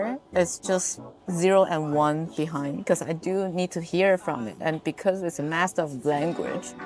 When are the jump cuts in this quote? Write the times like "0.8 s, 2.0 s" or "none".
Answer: none